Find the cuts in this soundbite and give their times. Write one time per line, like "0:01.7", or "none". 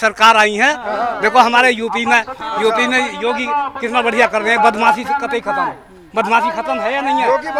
none